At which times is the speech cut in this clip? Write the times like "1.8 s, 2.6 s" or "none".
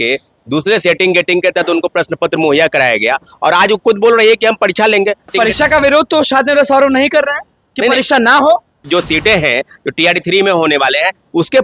5.3 s, 8.8 s